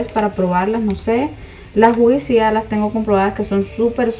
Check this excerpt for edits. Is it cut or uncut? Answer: uncut